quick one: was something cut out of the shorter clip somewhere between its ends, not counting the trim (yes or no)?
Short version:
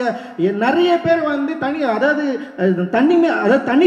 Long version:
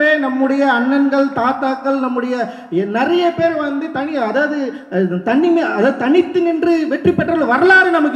no